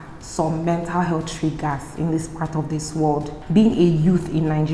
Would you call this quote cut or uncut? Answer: cut